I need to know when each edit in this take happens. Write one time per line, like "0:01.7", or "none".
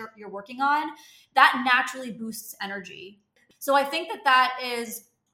0:03.2